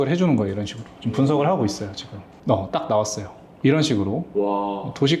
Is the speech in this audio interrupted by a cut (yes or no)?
no